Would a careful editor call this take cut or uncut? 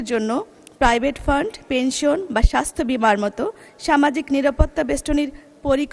uncut